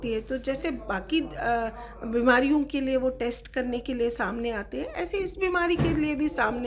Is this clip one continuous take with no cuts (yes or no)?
yes